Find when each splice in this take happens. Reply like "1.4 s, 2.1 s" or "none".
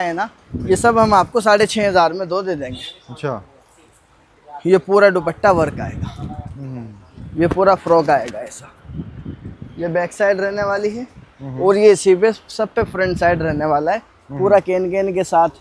7.1 s